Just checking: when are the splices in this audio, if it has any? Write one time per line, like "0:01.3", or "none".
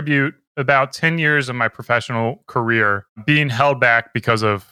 0:03.1